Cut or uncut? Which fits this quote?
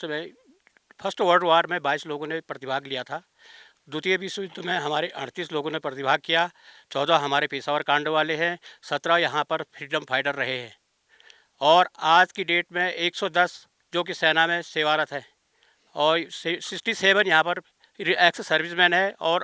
uncut